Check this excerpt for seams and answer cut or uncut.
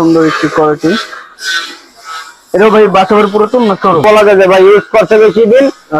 cut